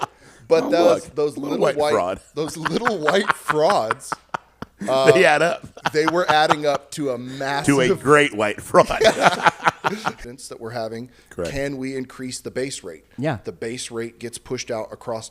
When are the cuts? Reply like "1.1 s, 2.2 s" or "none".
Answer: 10.2 s